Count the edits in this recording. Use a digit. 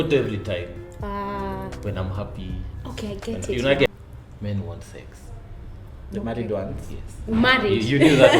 1